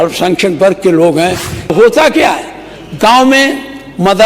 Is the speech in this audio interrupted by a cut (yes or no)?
yes